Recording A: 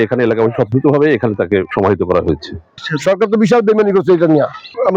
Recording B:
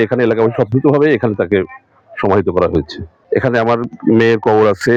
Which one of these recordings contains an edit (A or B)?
A